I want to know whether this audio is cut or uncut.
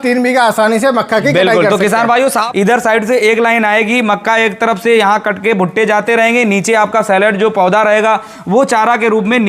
cut